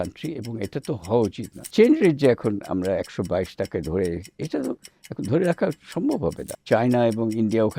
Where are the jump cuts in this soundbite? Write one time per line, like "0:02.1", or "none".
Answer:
0:01.7
0:06.5